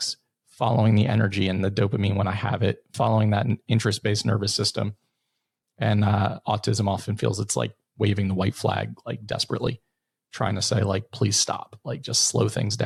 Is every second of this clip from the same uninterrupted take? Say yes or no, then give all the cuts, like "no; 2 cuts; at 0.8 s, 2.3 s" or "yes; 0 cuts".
yes; 0 cuts